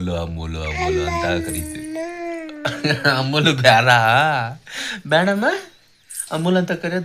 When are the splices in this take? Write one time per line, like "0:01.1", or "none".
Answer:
none